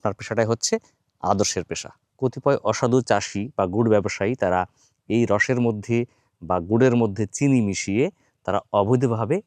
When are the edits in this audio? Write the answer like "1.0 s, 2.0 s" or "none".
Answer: 2.1 s

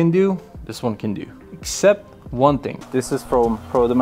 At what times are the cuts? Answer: 2.8 s

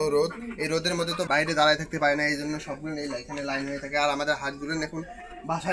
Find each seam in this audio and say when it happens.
1.2 s

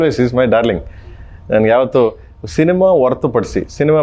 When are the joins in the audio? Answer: none

